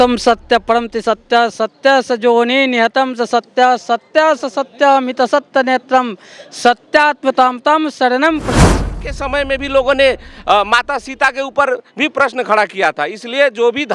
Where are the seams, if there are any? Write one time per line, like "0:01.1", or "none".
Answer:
0:08.8

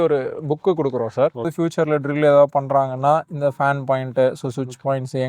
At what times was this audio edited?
0:01.5

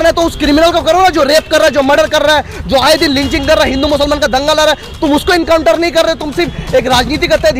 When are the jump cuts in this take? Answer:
none

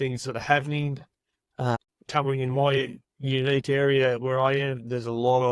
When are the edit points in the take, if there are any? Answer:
0:01.8

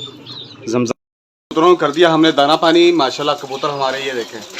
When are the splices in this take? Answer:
0:00.9

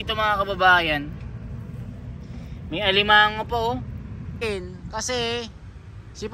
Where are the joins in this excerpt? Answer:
0:04.4

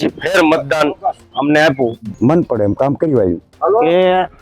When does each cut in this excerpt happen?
0:02.0
0:03.5

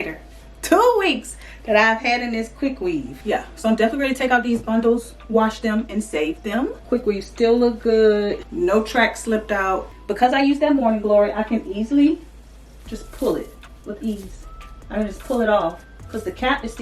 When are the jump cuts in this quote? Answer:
0:03.1
0:06.8
0:08.4
0:09.9
0:13.6

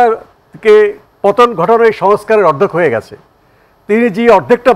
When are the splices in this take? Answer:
none

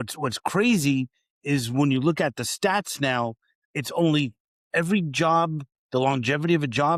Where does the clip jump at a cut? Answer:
none

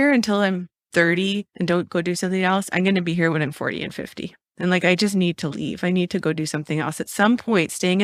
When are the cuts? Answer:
none

